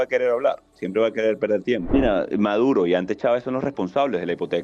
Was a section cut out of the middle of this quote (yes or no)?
yes